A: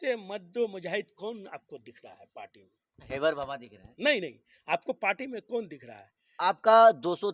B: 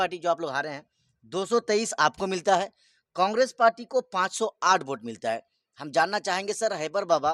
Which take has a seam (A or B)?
A